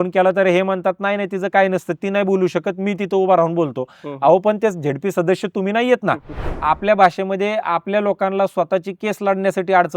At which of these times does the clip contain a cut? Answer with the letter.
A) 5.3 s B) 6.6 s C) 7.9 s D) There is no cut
B